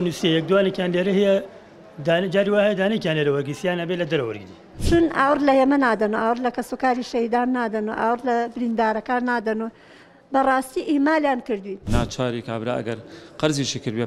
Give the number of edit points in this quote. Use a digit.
2